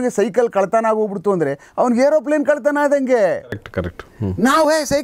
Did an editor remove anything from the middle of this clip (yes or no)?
no